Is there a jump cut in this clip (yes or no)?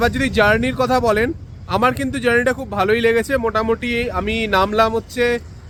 no